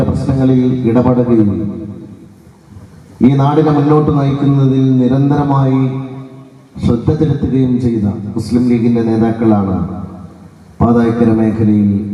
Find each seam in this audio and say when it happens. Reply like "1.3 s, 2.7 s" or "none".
none